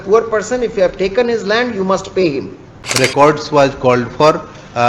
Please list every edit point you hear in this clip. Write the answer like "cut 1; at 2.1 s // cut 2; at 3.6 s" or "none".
cut 1; at 2.8 s